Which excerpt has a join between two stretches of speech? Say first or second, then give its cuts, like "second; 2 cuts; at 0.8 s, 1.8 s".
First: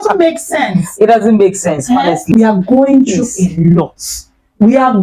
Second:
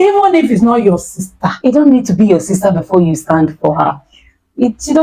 first; 1 cut; at 2.3 s